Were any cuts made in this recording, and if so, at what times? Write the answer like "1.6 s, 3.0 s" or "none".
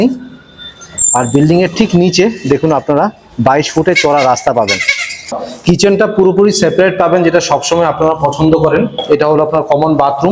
5.4 s, 9.0 s